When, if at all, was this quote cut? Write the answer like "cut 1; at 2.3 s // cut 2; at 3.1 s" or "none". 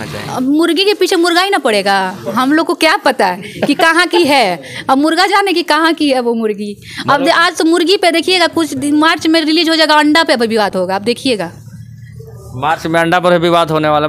none